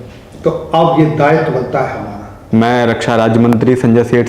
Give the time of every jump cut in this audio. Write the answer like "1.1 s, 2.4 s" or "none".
2.3 s